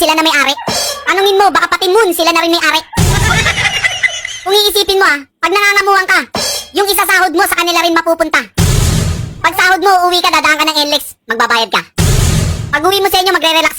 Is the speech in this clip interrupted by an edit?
no; 0 cuts

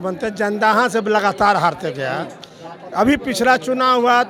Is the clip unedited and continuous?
yes; 0 cuts

